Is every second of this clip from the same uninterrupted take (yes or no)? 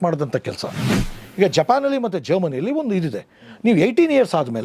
no